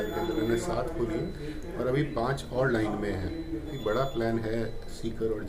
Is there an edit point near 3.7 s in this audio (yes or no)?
yes